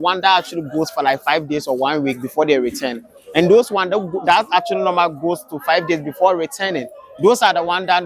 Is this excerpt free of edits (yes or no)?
yes